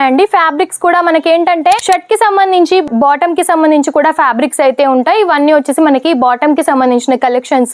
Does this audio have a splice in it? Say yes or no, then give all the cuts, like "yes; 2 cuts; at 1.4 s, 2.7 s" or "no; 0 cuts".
yes; 1 cut; at 1.8 s